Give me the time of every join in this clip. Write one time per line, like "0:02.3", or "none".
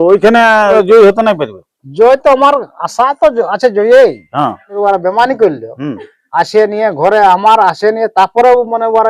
0:00.7
0:04.7